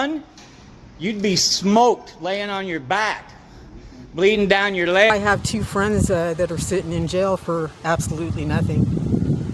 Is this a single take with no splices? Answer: no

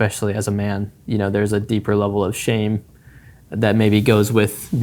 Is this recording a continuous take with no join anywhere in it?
yes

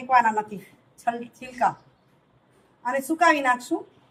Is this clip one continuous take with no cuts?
yes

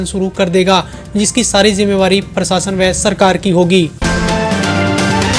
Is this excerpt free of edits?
no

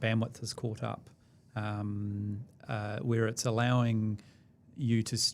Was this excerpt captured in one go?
yes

